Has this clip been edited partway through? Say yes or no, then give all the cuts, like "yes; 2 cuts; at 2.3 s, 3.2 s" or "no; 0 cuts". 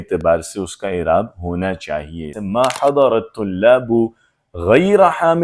yes; 1 cut; at 2.4 s